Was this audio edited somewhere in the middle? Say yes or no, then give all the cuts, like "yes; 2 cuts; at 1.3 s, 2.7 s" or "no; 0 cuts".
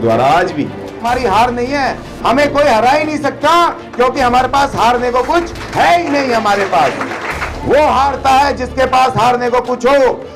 yes; 2 cuts; at 1.0 s, 7.2 s